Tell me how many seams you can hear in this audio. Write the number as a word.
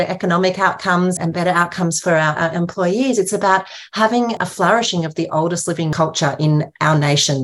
three